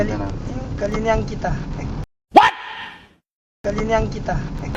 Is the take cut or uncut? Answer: uncut